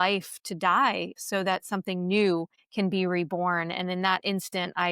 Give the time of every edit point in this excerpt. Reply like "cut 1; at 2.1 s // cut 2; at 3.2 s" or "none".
cut 1; at 1.1 s // cut 2; at 2.6 s